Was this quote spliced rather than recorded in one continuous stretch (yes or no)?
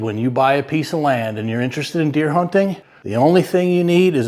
no